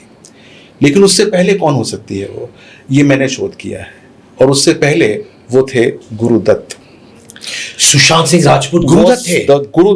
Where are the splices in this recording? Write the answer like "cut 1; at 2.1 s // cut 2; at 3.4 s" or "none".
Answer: none